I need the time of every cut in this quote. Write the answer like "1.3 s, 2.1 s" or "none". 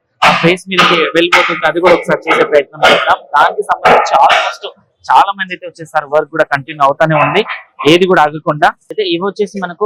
none

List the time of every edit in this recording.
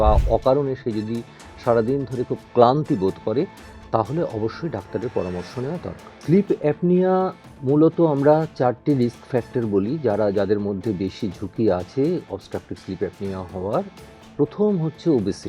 6.1 s

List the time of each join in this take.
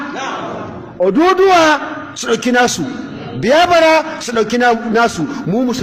none

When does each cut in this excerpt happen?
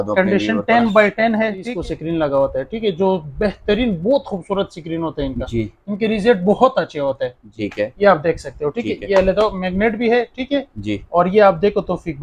1.7 s, 7.5 s

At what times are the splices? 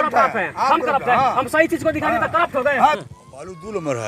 3.0 s

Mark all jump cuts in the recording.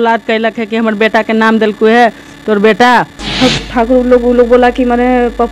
3.2 s

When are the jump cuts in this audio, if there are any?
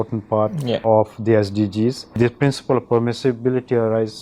0.8 s, 2.1 s

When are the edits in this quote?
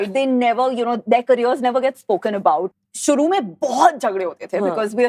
2.7 s

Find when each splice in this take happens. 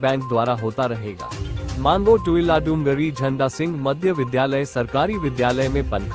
none

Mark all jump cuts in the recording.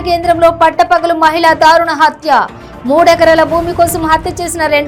none

